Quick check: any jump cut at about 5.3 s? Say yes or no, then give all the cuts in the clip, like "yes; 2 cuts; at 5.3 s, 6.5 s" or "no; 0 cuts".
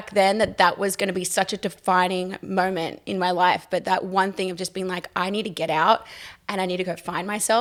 no; 0 cuts